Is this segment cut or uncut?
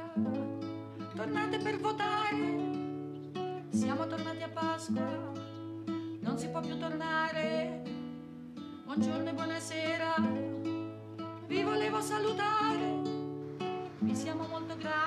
cut